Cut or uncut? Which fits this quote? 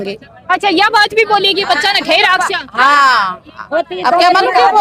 uncut